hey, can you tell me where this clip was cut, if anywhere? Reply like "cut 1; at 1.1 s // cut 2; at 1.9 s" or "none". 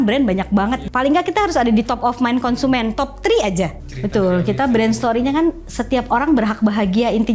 cut 1; at 0.8 s // cut 2; at 3.8 s